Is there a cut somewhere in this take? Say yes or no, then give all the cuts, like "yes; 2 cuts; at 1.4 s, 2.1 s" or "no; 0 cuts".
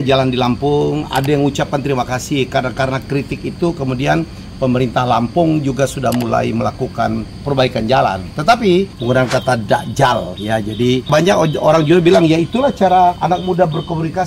yes; 4 cuts; at 7.3 s, 8.9 s, 11.1 s, 13.2 s